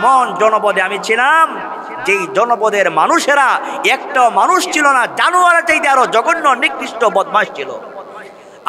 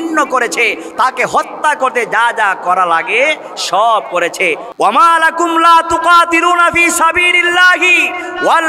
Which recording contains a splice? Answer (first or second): second